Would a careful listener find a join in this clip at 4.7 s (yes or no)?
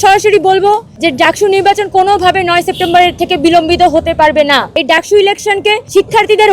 yes